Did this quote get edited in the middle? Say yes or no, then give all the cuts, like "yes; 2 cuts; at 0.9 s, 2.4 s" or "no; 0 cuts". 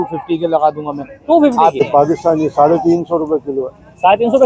yes; 1 cut; at 1.8 s